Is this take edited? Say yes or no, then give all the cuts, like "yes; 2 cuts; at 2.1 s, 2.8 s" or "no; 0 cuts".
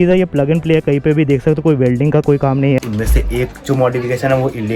yes; 1 cut; at 2.8 s